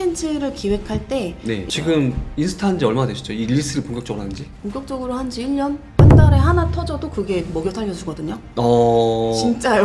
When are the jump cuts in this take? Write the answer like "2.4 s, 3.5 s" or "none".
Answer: 1.6 s, 5.9 s